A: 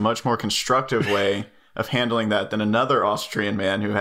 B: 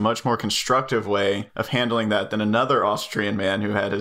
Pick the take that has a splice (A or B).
B